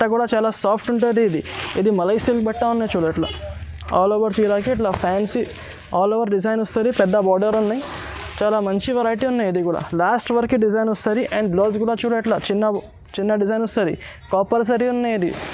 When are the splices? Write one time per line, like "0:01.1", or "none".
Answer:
none

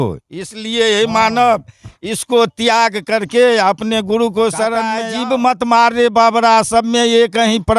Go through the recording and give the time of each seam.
0:05.0

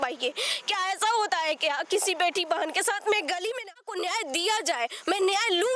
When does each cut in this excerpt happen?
0:03.7

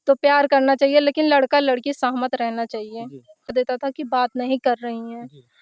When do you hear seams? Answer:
0:03.5

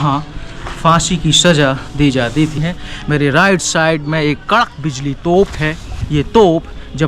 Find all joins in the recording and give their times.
0:02.6
0:05.9

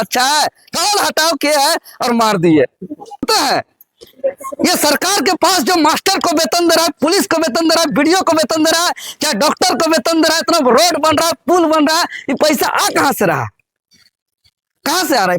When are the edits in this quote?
0:03.2

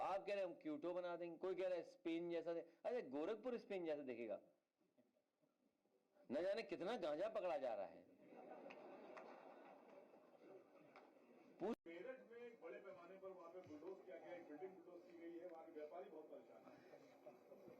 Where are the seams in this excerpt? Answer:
0:11.7

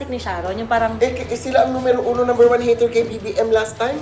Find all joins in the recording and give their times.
none

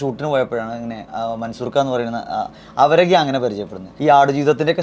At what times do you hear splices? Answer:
0:03.8

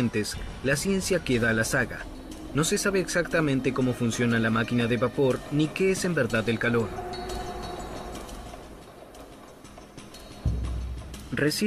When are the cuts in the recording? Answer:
0:04.9

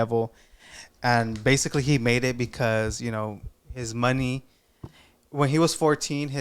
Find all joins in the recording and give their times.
none

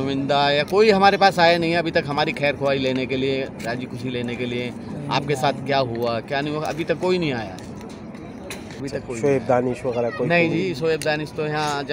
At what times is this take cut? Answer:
0:08.7

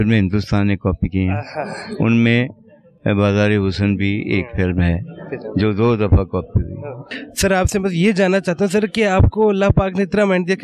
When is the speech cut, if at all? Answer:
none

